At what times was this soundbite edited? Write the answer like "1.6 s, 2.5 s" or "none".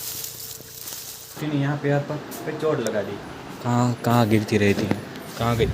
1.4 s